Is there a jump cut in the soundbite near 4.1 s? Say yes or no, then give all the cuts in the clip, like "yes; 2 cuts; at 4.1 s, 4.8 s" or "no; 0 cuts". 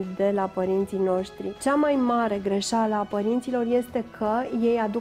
no; 1 cut; at 1.4 s